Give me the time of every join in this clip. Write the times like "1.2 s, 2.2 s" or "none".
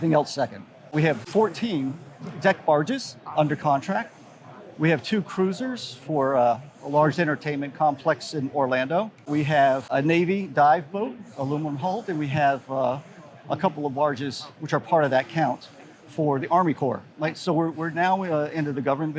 0.9 s